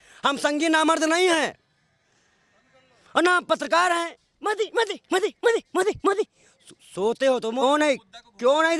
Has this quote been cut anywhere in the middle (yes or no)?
yes